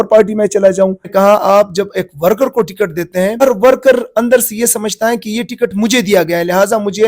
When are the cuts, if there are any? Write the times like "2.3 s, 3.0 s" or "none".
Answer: 1.0 s, 3.4 s